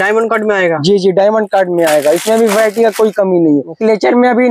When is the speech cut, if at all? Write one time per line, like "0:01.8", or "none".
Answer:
none

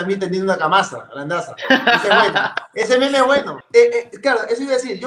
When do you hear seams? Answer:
0:03.6

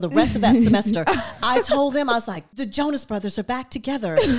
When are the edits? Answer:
0:02.4

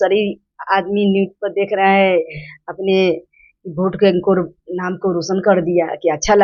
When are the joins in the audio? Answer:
none

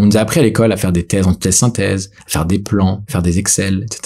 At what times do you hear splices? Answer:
0:03.0

